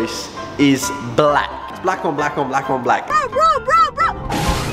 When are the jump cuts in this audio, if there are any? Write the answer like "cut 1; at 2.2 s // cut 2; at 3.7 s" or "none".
cut 1; at 1.7 s // cut 2; at 3.0 s